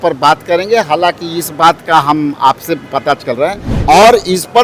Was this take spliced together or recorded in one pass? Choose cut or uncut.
cut